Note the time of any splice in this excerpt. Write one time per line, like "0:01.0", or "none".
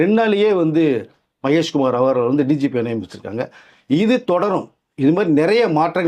none